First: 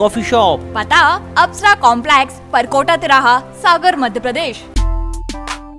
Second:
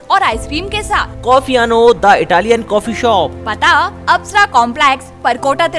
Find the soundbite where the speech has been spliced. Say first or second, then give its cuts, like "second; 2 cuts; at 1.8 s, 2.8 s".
first; 1 cut; at 4.7 s